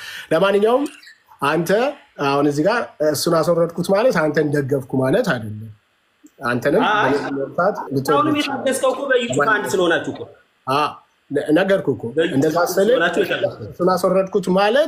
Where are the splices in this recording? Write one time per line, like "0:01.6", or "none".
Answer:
none

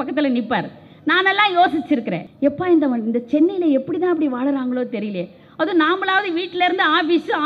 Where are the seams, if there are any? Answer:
0:02.2

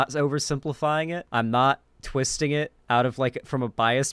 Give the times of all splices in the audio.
0:01.2
0:02.8

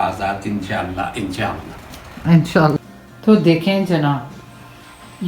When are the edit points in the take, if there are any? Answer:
0:02.8

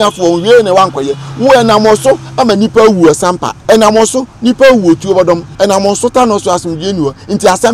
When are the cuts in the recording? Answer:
0:03.5
0:05.5

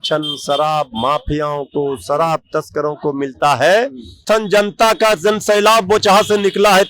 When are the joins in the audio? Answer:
0:04.2

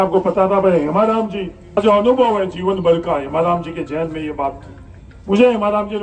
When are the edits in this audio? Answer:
0:01.8

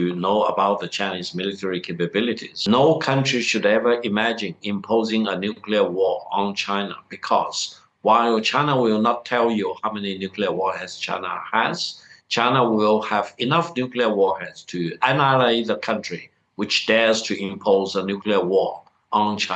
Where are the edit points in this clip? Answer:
0:02.5

